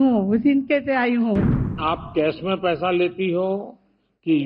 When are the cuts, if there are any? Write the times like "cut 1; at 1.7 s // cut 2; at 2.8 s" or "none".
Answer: cut 1; at 1.8 s